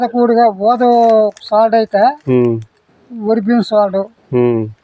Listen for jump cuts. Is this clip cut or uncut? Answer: uncut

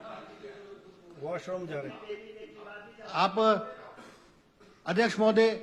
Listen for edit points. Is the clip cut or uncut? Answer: uncut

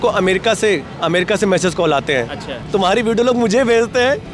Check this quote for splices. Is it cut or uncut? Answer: cut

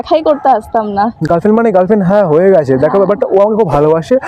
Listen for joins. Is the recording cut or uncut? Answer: uncut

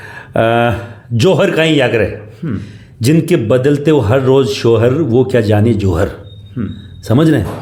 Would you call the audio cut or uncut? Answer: uncut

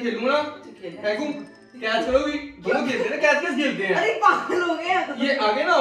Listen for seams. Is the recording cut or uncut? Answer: uncut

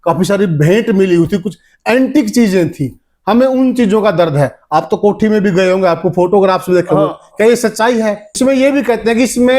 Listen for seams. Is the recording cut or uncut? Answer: cut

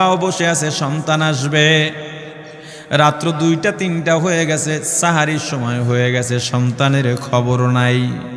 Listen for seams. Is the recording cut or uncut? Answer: uncut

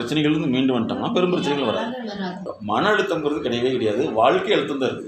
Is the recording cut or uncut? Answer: cut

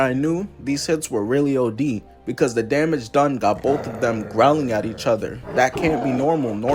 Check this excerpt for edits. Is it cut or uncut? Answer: uncut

